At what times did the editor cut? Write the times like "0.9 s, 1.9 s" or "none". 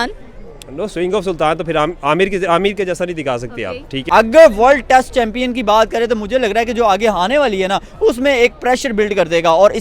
4.1 s